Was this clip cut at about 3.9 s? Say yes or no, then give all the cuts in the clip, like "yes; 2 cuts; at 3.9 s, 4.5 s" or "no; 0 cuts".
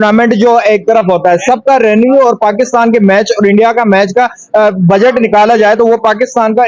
no; 0 cuts